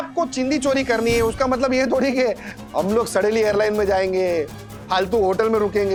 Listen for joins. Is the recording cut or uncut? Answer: uncut